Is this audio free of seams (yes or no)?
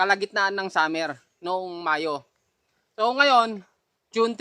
yes